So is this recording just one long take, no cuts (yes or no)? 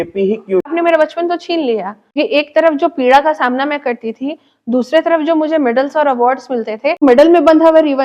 no